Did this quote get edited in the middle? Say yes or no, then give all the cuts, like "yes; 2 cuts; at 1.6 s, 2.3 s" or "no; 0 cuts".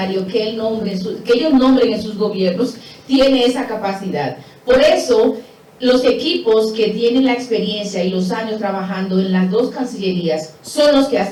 no; 0 cuts